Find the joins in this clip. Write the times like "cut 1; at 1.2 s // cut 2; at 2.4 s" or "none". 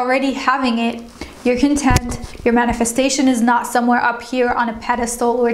none

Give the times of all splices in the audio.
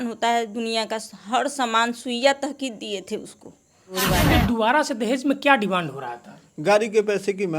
cut 1; at 4.0 s

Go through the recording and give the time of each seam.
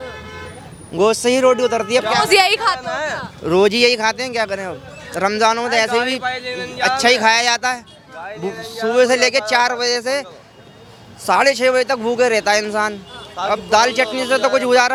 none

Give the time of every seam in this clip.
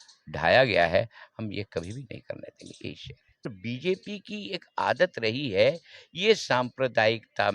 cut 1; at 3.5 s

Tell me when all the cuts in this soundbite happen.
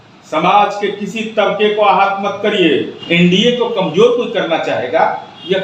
cut 1; at 3.0 s

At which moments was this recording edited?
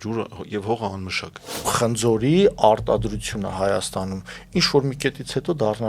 cut 1; at 1.7 s

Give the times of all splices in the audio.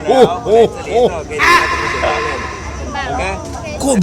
none

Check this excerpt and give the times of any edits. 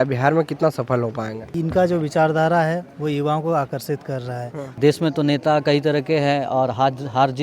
cut 1; at 1.5 s // cut 2; at 4.8 s

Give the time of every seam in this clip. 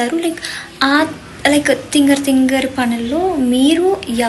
none

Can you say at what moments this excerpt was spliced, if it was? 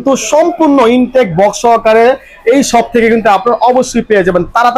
none

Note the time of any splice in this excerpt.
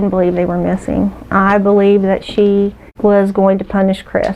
cut 1; at 2.8 s

